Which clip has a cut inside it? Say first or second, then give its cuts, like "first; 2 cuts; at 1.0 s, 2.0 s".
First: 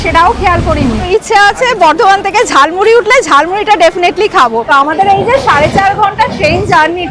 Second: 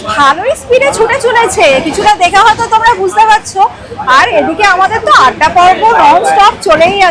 first; 2 cuts; at 1.1 s, 4.6 s